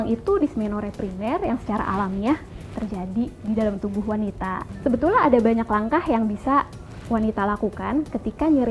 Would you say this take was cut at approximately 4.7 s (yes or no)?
yes